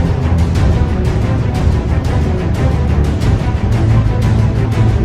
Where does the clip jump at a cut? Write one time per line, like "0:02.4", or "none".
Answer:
0:02.5